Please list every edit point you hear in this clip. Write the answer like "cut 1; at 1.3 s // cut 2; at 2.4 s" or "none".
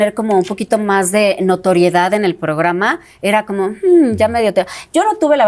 none